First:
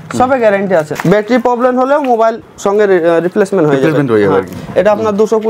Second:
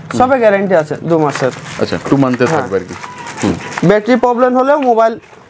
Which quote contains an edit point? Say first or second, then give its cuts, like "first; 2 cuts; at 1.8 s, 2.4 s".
first; 2 cuts; at 0.9 s, 2.5 s